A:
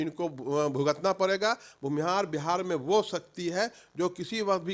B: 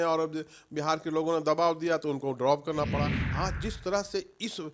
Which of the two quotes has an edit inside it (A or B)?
B